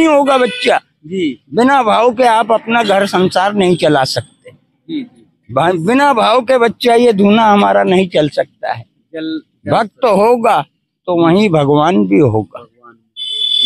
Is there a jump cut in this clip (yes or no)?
no